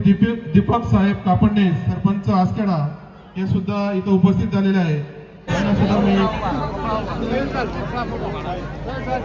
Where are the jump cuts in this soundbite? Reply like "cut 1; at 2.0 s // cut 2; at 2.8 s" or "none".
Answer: cut 1; at 6.3 s